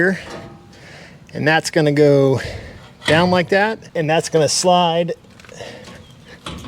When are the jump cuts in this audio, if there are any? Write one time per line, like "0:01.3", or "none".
0:03.8

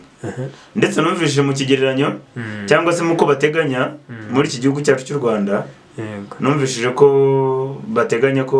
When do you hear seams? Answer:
none

